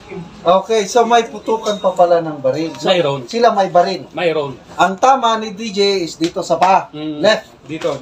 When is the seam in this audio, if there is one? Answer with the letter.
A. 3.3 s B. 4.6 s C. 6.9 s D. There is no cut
B